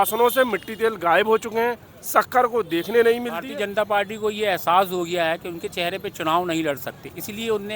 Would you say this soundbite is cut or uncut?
cut